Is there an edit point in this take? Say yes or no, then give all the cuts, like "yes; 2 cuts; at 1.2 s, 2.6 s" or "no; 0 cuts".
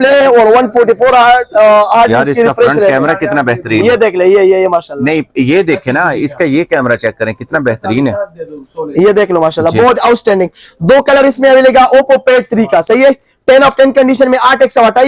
no; 0 cuts